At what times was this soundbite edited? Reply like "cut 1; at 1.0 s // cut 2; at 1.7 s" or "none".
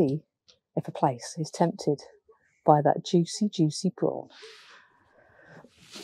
cut 1; at 4.9 s